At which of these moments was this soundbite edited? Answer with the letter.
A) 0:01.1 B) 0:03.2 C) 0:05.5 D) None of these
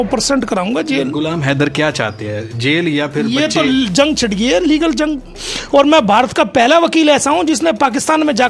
C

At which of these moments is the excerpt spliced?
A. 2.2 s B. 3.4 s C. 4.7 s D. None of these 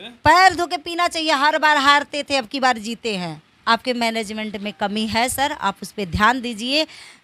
B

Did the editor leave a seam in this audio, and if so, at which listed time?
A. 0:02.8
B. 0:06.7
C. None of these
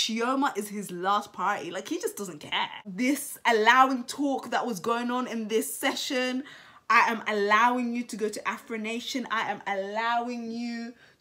A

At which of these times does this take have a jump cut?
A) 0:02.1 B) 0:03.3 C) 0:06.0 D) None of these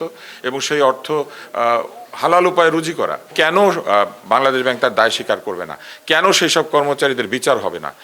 B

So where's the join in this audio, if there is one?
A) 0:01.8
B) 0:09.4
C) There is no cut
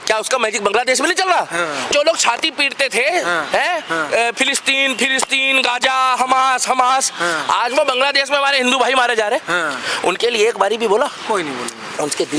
A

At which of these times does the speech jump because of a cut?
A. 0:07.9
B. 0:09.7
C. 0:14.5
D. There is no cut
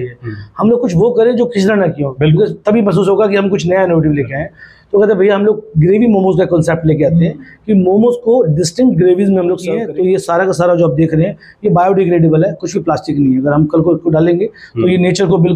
B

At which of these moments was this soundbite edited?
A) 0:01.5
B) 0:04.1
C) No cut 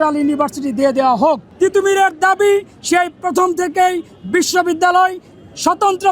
A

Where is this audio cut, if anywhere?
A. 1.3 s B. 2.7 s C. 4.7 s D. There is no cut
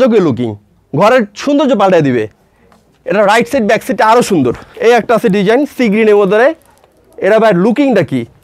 C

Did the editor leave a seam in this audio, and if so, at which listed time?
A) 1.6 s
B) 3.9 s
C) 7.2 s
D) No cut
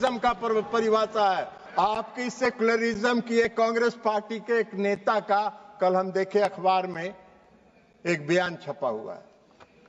A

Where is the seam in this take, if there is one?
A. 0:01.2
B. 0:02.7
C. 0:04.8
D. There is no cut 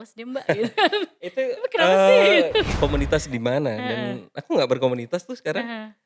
B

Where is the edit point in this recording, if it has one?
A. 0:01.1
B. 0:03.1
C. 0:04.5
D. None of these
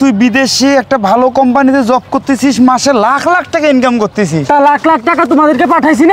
D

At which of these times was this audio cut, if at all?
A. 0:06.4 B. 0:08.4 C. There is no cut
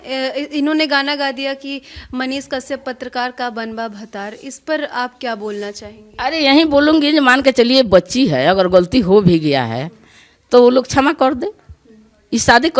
C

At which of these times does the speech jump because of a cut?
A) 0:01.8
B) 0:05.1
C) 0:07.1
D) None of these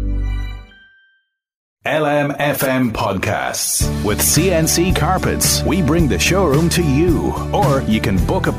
A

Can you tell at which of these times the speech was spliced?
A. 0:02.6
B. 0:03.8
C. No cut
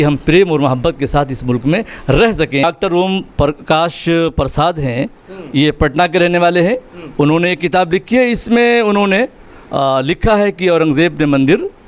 A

